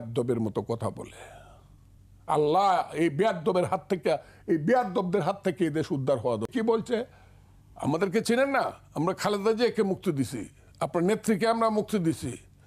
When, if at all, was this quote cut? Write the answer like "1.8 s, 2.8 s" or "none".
6.5 s